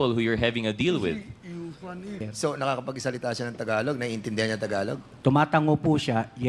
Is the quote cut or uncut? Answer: cut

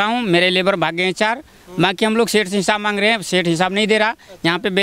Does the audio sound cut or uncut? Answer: uncut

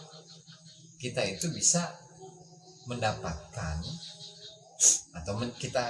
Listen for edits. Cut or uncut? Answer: uncut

